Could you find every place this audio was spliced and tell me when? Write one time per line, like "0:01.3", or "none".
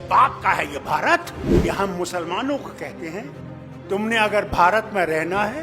0:01.4